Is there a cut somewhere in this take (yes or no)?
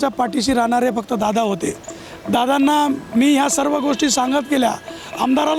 no